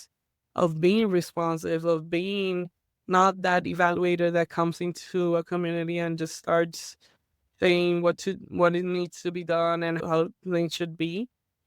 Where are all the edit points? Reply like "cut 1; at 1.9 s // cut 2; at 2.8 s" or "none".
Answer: cut 1; at 10.0 s